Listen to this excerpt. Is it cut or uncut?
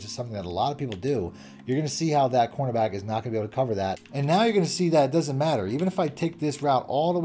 cut